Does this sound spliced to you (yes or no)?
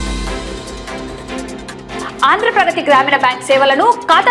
no